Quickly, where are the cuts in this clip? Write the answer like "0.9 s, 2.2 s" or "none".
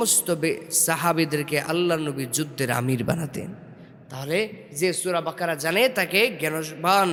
none